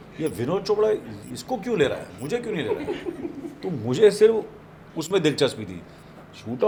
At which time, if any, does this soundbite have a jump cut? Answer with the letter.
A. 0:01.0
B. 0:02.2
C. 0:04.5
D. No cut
D